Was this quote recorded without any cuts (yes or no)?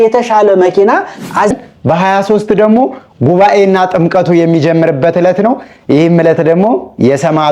no